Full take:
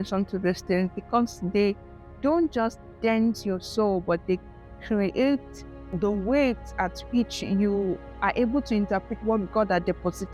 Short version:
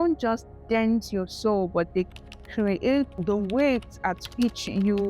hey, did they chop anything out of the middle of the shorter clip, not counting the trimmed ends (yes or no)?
yes